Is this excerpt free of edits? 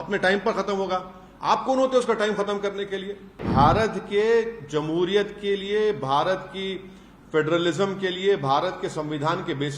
no; 1 cut; at 3.4 s

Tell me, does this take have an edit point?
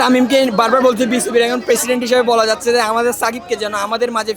no; 0 cuts

